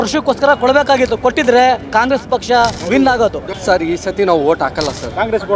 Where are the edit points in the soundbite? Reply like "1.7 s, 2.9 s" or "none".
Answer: 2.8 s, 3.5 s